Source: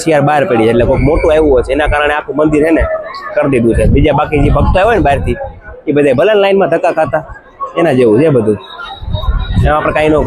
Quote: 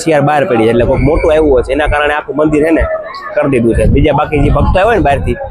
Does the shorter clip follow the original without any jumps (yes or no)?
yes